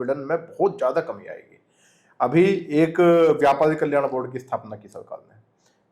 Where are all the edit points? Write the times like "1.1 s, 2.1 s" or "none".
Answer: none